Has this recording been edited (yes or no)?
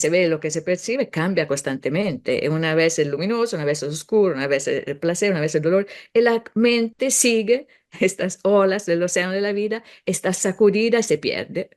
no